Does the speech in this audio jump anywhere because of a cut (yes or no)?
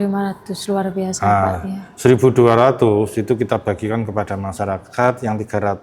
no